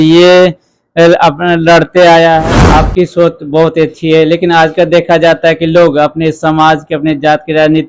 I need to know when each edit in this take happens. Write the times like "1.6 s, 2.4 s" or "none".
2.4 s